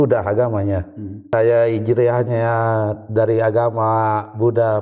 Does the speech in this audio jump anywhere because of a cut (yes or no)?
yes